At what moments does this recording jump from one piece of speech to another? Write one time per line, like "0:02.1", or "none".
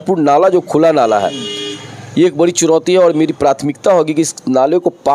none